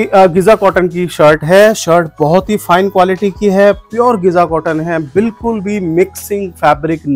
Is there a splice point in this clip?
no; 0 cuts

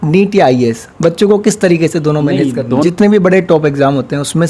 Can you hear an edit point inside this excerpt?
yes; 1 cut; at 2.8 s

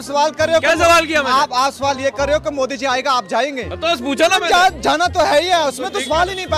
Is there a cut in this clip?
no; 0 cuts

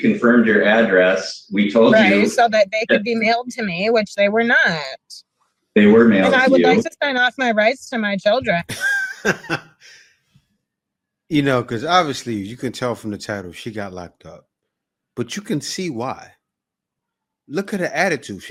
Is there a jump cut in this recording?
no; 0 cuts

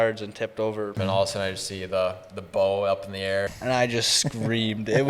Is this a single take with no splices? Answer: no; 2 cuts; at 0.9 s, 3.5 s

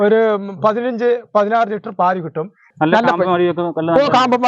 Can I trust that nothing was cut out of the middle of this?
no; 1 cut; at 2.6 s

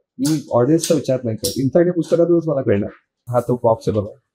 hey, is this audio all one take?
no; 1 cut; at 3.2 s

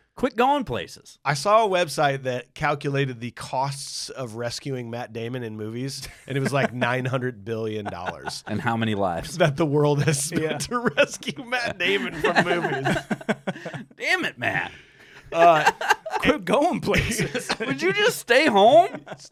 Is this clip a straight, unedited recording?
yes; 0 cuts

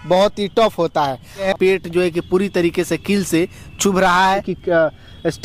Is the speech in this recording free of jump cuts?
no; 2 cuts; at 1.4 s, 4.5 s

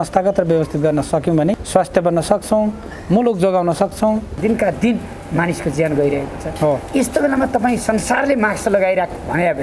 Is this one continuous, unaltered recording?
no; 2 cuts; at 1.6 s, 4.3 s

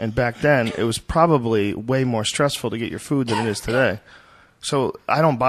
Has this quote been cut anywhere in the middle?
yes; 1 cut; at 3.1 s

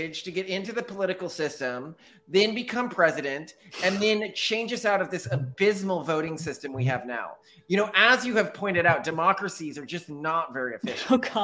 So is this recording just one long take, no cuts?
yes; 0 cuts

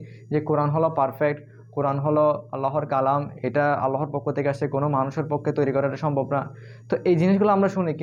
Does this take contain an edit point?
no; 0 cuts

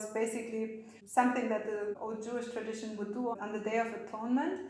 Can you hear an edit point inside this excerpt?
yes; 2 cuts; at 2.0 s, 3.3 s

